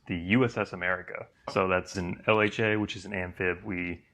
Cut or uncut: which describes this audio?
cut